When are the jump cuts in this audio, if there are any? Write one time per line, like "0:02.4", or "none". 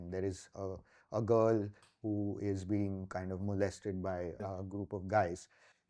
0:04.4